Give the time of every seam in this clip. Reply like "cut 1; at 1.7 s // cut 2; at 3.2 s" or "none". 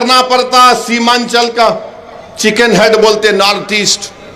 none